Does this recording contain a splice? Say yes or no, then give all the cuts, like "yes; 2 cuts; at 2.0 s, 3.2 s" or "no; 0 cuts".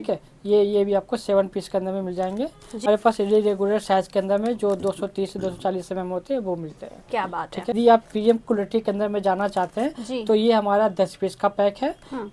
yes; 2 cuts; at 2.9 s, 7.7 s